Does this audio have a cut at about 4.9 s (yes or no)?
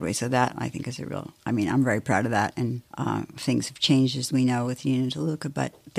no